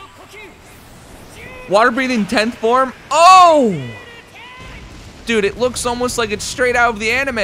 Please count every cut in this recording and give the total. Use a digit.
0